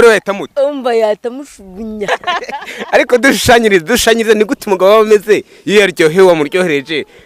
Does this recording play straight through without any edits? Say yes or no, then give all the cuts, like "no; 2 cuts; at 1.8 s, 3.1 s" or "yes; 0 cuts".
no; 1 cut; at 2.1 s